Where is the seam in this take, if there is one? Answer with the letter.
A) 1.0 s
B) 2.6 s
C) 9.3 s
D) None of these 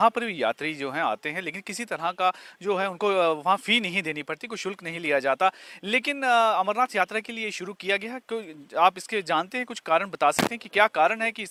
D